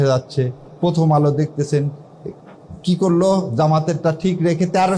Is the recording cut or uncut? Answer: uncut